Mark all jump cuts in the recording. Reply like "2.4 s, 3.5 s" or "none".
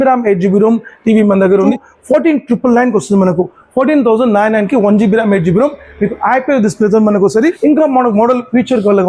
1.7 s, 7.6 s